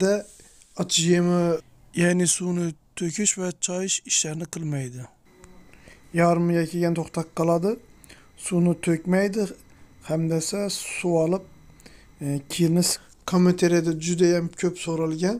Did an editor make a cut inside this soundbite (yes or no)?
yes